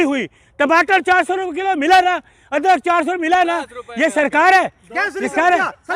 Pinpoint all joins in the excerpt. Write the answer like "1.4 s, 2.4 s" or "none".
none